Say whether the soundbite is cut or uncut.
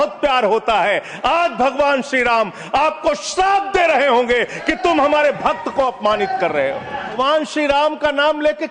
cut